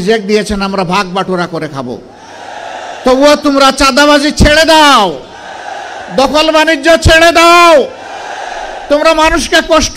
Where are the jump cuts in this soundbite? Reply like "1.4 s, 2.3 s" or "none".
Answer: none

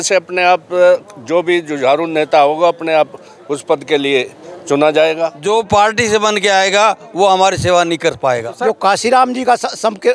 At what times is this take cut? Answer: 5.4 s, 8.5 s

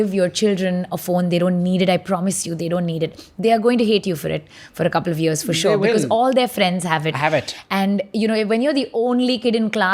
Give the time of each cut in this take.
none

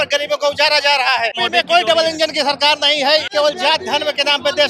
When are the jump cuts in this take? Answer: 1.4 s, 3.3 s

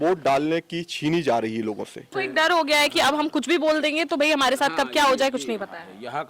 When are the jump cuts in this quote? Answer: 2.1 s

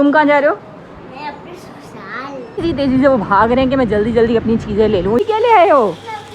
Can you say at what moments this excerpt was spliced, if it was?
2.6 s, 5.2 s

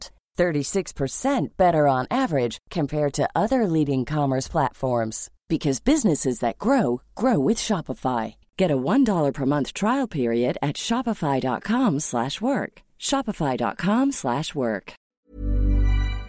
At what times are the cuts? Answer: 15.2 s

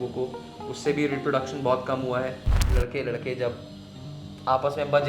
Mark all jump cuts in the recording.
2.6 s

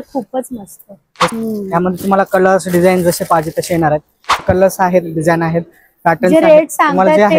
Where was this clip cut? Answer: 1.3 s, 4.4 s

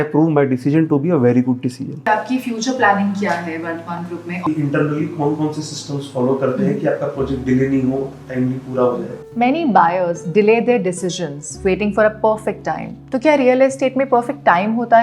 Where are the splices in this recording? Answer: 2.0 s, 4.4 s, 9.2 s

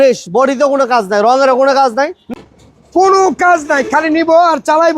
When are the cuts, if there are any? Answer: 2.3 s

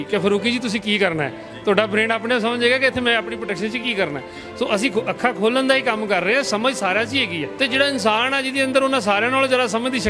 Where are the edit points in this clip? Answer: 7.4 s

